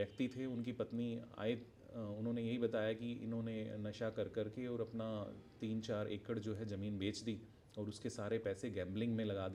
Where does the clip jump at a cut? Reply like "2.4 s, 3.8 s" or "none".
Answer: none